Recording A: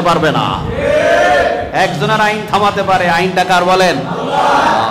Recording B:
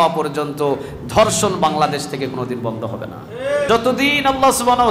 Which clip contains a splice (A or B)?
B